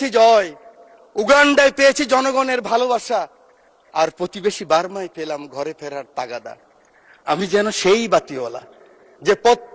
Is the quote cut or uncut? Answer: uncut